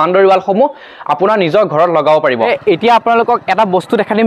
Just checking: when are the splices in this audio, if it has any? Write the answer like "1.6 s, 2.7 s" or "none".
none